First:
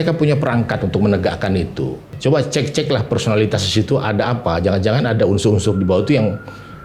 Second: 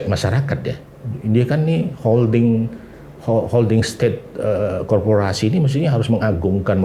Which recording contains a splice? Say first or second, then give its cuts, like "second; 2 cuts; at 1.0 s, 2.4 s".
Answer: first; 1 cut; at 2.0 s